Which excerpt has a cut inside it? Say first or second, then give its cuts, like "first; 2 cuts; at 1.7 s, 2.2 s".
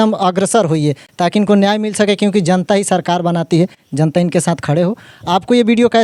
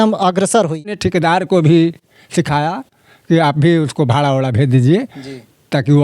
second; 1 cut; at 1.0 s